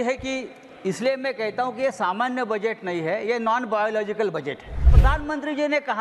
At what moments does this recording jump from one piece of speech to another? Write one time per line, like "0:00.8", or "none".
0:04.9